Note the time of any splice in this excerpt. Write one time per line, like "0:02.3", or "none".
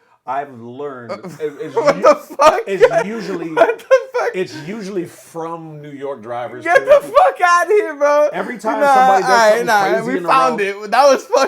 none